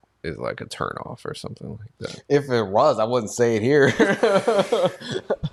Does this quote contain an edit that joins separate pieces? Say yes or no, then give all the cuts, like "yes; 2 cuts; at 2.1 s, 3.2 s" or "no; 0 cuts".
no; 0 cuts